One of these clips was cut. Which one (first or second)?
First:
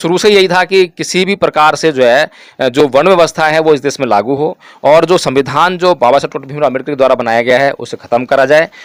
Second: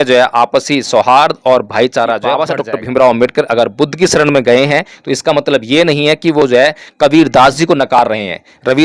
second